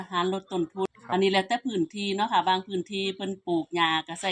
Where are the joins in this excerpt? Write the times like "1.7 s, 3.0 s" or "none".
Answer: 0.9 s